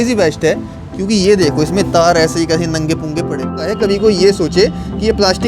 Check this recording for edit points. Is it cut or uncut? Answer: cut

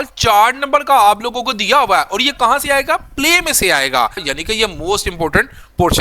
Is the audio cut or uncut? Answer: cut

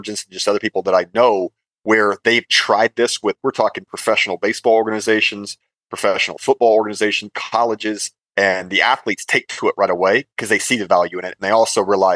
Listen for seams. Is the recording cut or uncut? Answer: uncut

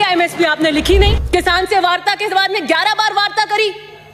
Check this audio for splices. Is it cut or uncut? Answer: cut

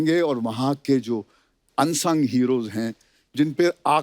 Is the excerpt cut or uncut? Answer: uncut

